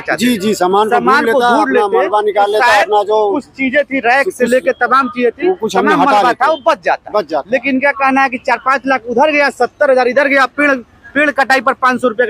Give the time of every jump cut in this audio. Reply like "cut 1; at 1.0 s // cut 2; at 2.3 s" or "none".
none